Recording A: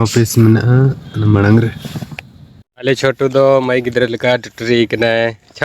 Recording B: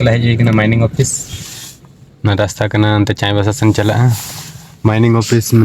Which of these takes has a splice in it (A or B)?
A